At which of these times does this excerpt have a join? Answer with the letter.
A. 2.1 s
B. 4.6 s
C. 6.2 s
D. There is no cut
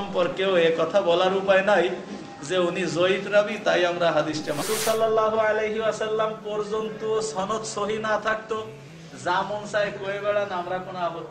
B